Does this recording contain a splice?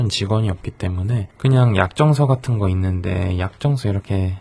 no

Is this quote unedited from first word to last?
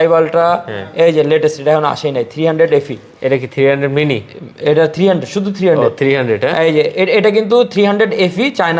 yes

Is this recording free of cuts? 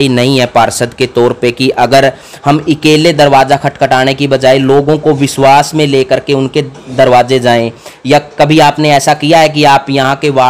yes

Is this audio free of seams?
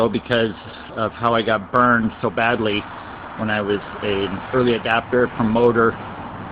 no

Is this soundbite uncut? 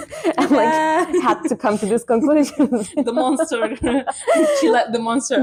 yes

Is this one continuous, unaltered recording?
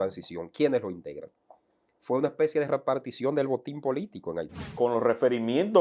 no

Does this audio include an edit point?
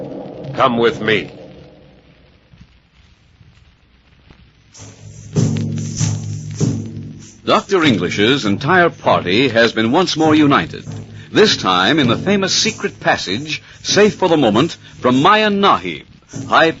yes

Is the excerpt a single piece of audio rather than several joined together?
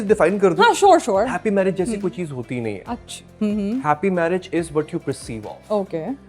yes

